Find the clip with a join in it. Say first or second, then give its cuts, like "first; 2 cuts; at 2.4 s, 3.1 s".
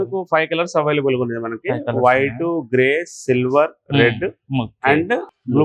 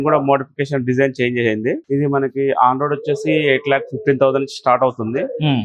second; 1 cut; at 1.8 s